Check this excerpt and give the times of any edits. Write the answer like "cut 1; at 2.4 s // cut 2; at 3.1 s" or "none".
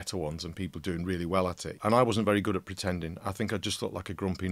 cut 1; at 1.7 s

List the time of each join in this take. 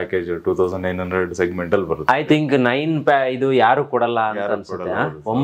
none

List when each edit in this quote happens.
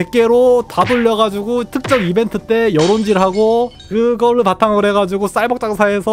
none

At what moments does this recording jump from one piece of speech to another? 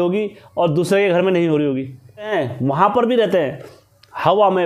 cut 1; at 2.3 s

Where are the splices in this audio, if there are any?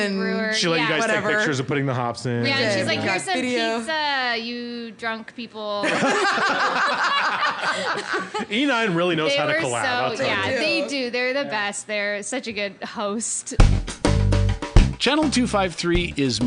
cut 1; at 13.4 s

